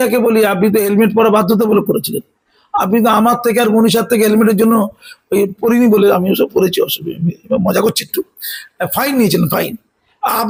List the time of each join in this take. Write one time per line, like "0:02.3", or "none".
none

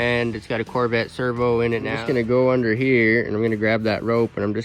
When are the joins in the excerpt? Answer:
0:02.0

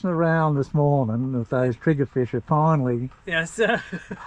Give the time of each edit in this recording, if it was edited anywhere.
none

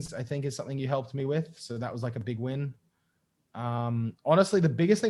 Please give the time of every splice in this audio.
none

